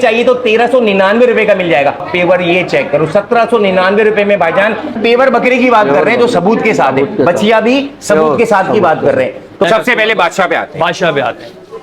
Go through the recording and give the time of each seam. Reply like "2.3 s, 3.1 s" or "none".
2.1 s, 4.9 s, 9.7 s